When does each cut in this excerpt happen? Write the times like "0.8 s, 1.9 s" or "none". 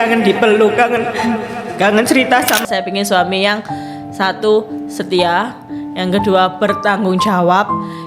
2.6 s